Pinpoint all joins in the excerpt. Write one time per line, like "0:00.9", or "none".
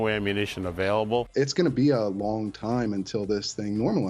0:01.3